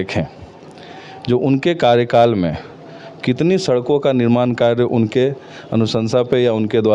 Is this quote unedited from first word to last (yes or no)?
yes